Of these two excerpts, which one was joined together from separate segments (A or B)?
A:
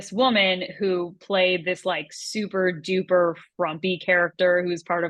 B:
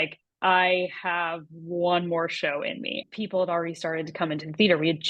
B